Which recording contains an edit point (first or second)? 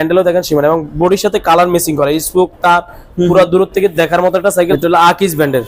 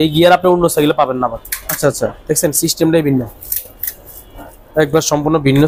first